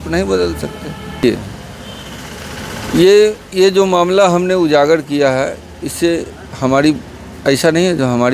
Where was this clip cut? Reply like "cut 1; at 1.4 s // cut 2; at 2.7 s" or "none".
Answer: cut 1; at 1.2 s